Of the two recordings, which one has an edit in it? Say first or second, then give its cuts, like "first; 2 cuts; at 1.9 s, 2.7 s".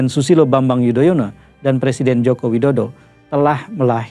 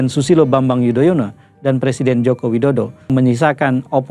second; 1 cut; at 3.1 s